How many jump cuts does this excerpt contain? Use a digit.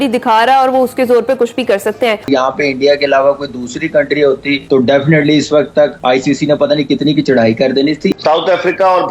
2